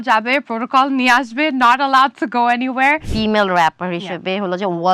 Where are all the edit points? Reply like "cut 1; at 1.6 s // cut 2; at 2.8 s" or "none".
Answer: cut 1; at 3.1 s